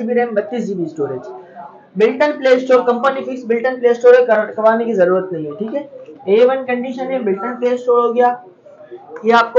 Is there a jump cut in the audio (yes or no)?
no